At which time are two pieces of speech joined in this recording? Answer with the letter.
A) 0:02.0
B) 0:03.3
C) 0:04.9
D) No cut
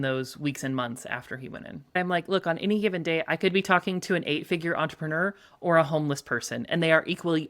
A